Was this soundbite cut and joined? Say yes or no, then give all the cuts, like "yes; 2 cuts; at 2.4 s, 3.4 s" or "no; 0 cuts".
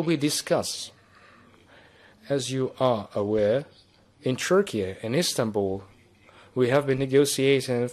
no; 0 cuts